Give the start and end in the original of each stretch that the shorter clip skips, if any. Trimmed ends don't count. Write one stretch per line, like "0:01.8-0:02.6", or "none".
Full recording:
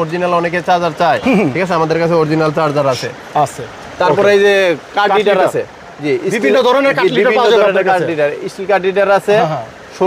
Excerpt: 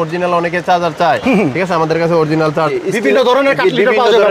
0:02.7-0:06.1